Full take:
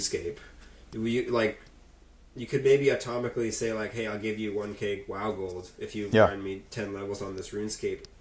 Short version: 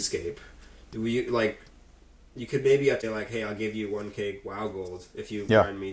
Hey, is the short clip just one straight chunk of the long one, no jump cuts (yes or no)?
no